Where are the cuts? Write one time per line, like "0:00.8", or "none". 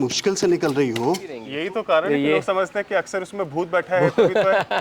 0:01.5